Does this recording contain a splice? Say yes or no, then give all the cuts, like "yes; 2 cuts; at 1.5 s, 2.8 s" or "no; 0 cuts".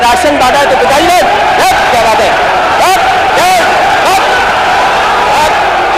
no; 0 cuts